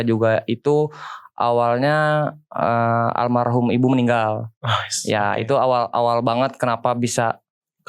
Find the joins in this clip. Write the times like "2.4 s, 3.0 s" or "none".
none